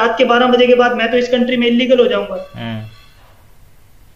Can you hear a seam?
no; 0 cuts

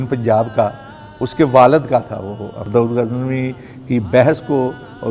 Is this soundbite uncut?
no; 1 cut; at 2.6 s

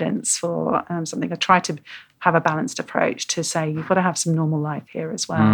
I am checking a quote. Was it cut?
no; 0 cuts

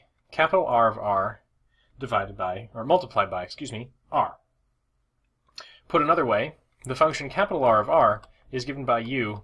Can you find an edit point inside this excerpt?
no; 0 cuts

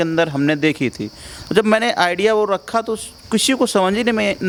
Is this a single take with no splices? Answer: yes; 0 cuts

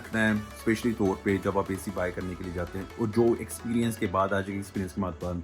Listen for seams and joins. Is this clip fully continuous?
yes; 0 cuts

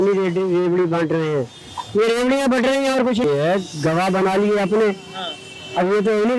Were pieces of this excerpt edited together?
yes; 1 cut; at 3.2 s

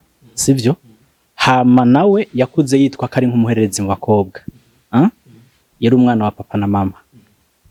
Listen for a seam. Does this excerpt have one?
no; 0 cuts

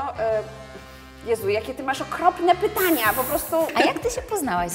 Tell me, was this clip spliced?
yes; 1 cut; at 3.7 s

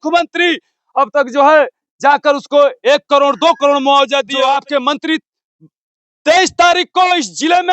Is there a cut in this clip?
yes; 1 cut; at 4.3 s

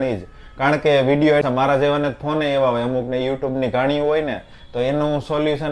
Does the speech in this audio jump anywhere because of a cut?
yes; 1 cut; at 1.4 s

